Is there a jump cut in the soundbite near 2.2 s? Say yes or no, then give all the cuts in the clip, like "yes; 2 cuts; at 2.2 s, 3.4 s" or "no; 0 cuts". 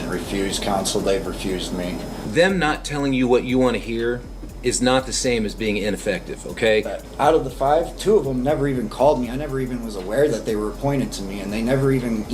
yes; 2 cuts; at 2.2 s, 7.0 s